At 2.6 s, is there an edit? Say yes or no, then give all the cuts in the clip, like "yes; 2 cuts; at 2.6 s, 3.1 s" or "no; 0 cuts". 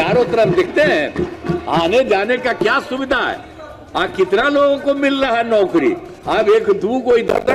no; 1 cut; at 6.1 s